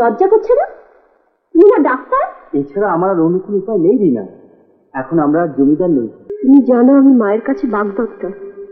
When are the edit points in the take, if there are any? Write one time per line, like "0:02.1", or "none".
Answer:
0:06.2